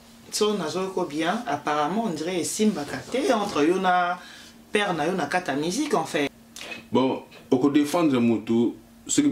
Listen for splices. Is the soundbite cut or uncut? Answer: cut